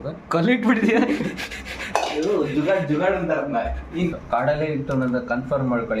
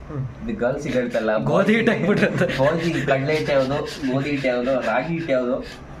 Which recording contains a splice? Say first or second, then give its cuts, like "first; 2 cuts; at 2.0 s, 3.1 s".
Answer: first; 1 cut; at 4.1 s